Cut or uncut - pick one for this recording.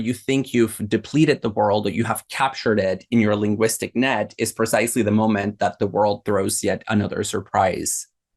uncut